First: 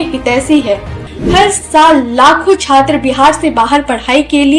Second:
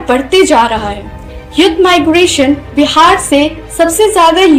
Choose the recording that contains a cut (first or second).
first